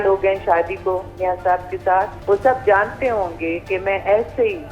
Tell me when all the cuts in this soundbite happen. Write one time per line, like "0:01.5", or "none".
0:02.1